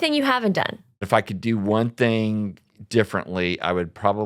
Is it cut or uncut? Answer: cut